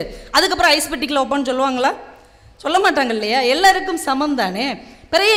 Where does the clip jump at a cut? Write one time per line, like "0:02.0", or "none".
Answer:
none